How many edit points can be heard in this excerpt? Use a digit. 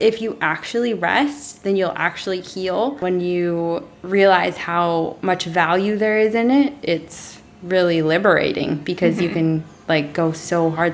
1